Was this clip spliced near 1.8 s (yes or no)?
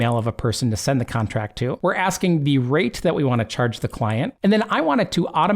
yes